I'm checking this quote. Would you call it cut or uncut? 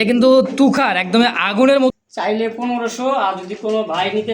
cut